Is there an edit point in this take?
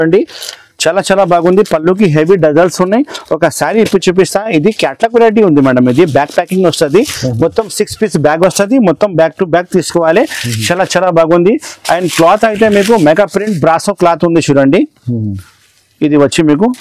no; 0 cuts

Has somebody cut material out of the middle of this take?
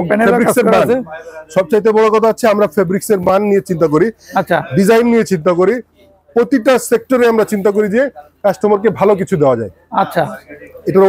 no; 0 cuts

